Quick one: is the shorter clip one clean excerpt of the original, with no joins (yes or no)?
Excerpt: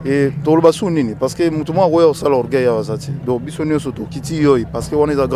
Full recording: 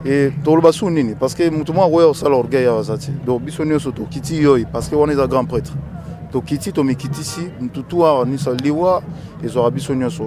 yes